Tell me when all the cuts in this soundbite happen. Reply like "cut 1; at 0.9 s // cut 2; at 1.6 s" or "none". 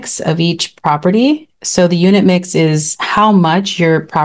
none